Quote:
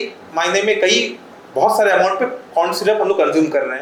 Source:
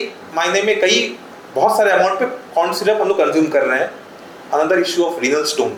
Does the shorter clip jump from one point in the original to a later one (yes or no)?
no